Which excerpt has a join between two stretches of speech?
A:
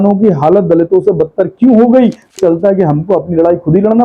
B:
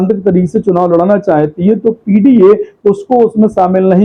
A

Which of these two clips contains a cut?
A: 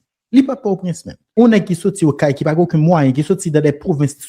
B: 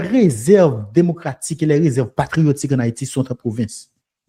A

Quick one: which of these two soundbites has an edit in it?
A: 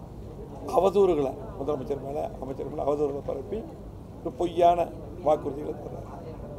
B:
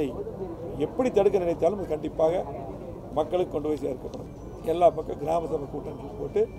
B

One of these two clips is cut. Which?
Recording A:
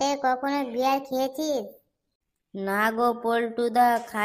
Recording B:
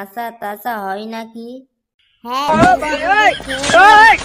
B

